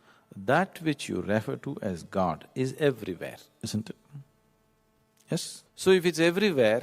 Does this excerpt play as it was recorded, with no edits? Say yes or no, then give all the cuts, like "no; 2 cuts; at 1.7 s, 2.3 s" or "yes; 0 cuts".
no; 1 cut; at 5.6 s